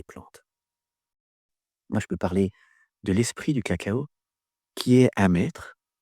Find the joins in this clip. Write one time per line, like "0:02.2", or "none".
0:01.3